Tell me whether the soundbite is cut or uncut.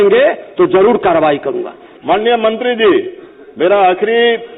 cut